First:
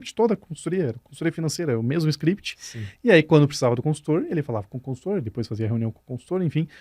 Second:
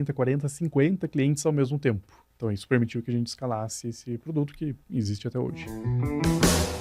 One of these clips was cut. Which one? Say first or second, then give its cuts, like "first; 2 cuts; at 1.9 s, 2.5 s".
second; 2 cuts; at 2.3 s, 5.9 s